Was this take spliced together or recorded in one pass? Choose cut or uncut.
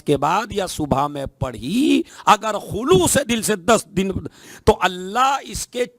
cut